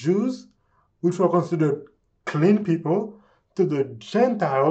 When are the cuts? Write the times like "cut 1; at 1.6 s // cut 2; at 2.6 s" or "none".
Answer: none